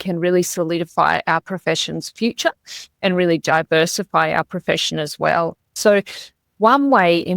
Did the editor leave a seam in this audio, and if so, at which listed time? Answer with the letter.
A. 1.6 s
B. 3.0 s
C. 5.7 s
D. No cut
C